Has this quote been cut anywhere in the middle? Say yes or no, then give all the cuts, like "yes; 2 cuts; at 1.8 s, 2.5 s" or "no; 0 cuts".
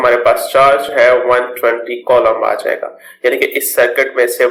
no; 0 cuts